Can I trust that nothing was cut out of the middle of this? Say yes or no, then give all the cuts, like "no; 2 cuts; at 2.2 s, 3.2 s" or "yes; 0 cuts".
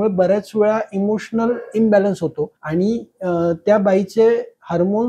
no; 1 cut; at 2.6 s